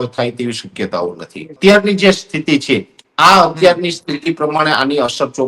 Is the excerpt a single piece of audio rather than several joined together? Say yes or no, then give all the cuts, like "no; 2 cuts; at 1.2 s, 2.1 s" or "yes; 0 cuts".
no; 1 cut; at 1.6 s